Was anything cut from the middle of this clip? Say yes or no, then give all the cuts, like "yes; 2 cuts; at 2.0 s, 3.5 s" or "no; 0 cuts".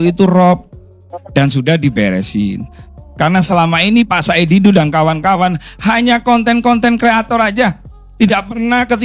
yes; 1 cut; at 2.8 s